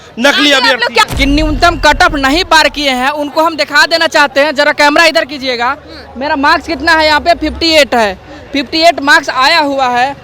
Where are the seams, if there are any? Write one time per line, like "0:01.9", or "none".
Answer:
0:01.1